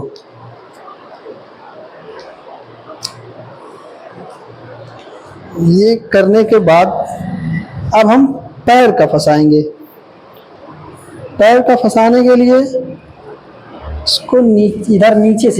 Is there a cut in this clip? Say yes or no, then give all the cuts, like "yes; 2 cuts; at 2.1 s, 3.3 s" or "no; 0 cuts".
no; 0 cuts